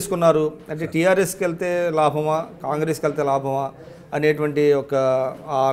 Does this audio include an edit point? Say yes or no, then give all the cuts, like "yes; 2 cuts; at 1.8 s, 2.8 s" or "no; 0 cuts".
no; 0 cuts